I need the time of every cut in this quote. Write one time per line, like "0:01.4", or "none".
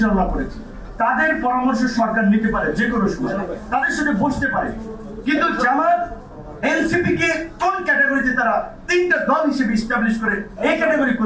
none